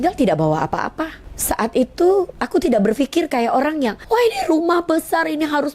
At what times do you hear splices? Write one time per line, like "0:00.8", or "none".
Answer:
0:01.3
0:04.0